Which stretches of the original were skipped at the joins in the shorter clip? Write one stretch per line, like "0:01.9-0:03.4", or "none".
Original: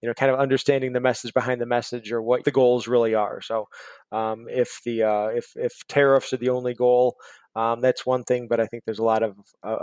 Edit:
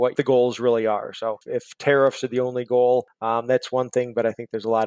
0:03.7-0:05.5
0:07.2-0:07.5